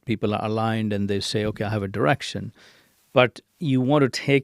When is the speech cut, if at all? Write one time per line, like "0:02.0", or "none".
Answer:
0:03.4